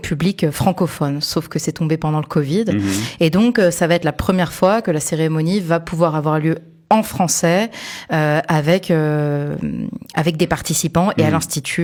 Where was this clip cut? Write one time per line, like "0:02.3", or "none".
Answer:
none